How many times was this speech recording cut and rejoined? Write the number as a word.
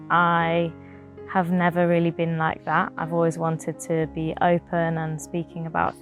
zero